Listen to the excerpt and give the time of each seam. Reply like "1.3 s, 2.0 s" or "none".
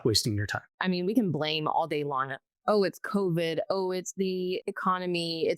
0.8 s, 4.6 s